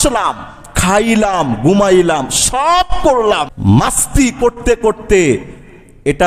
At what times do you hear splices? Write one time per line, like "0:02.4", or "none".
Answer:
0:03.5